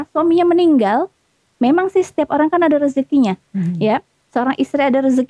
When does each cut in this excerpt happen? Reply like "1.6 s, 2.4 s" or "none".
none